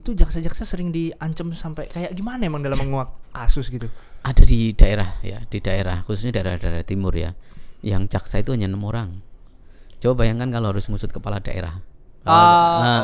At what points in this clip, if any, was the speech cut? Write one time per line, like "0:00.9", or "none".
none